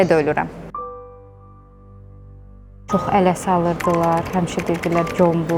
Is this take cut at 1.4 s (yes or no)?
no